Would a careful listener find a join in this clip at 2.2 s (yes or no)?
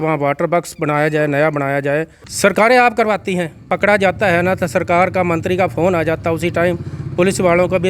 yes